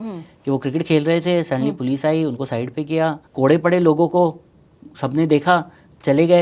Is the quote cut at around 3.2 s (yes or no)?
yes